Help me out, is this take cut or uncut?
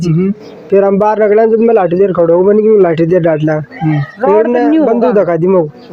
uncut